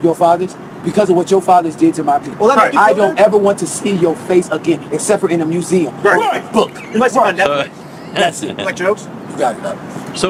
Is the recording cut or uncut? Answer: uncut